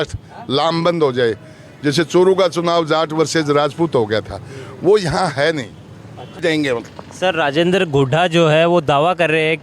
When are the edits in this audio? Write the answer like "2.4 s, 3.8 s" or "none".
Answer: 6.4 s